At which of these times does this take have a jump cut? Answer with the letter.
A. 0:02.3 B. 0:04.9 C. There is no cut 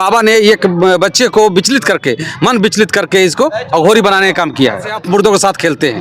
B